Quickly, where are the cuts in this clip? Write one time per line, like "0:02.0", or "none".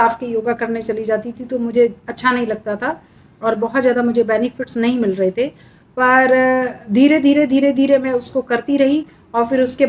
none